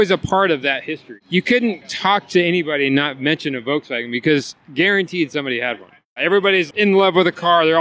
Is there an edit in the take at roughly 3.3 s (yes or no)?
no